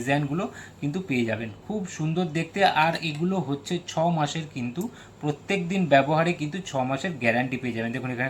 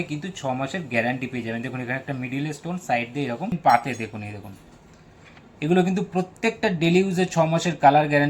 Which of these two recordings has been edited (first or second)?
second